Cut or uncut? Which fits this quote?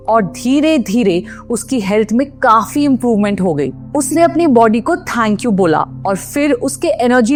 uncut